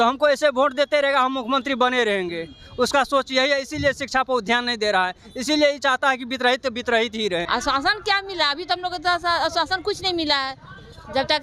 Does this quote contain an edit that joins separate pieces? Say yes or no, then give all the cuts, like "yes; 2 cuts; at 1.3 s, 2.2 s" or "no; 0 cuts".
yes; 1 cut; at 7.5 s